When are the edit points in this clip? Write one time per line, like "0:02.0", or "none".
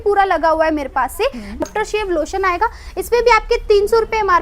0:01.6